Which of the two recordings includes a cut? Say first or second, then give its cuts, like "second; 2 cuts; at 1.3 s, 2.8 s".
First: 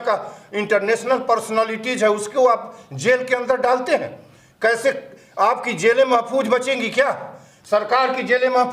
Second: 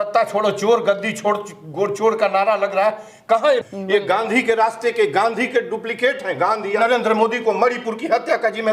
second; 2 cuts; at 3.6 s, 6.8 s